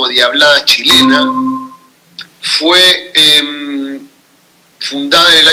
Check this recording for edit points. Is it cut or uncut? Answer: uncut